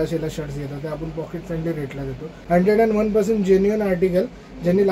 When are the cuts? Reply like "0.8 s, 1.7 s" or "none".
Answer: 2.3 s